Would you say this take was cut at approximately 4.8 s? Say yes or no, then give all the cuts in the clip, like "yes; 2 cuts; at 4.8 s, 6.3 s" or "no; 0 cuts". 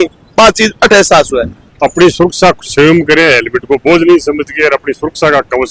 no; 1 cut; at 1.6 s